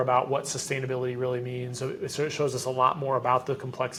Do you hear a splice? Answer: no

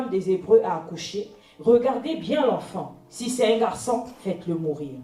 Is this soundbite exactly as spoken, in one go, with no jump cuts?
yes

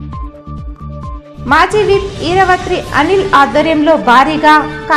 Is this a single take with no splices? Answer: no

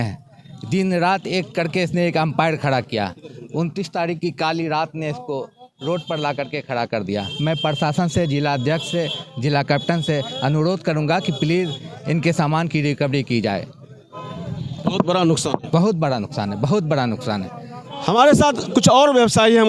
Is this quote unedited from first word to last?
yes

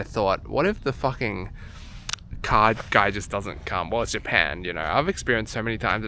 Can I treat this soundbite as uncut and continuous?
yes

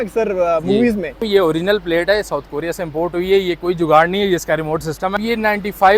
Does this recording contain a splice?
yes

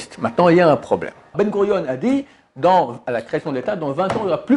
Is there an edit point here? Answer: yes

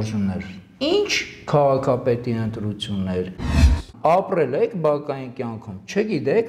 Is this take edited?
yes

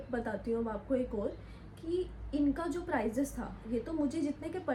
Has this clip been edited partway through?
no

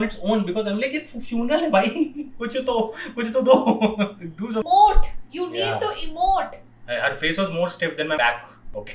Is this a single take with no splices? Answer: no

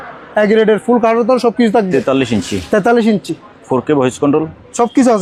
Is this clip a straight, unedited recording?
yes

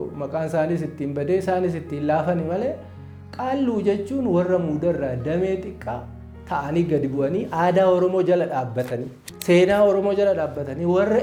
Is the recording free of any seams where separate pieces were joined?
yes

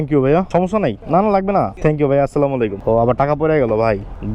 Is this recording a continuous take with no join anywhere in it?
no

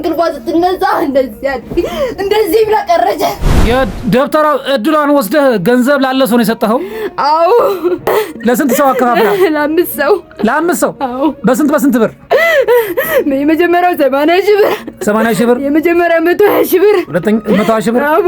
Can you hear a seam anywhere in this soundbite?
yes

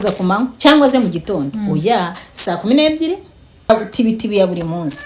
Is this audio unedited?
no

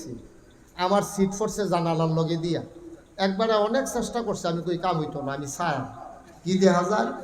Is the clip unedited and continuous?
yes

